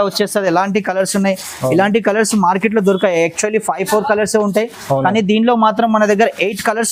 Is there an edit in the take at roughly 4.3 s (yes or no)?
no